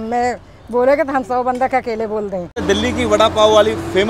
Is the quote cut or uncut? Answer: cut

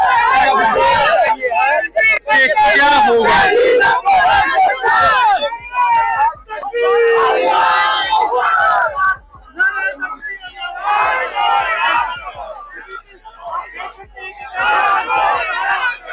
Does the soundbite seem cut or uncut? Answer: uncut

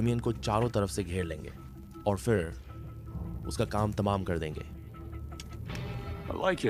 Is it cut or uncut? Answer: uncut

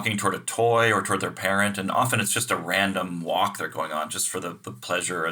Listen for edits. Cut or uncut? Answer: uncut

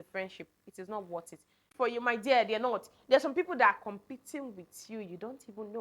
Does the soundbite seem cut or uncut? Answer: cut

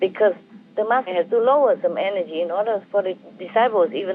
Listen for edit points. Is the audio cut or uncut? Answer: cut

